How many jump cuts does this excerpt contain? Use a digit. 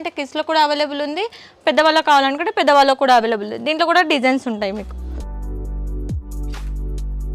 0